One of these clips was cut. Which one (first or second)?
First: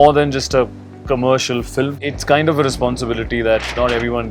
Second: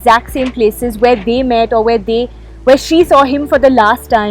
first